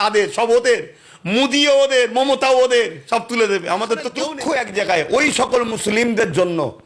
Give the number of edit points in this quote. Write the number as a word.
one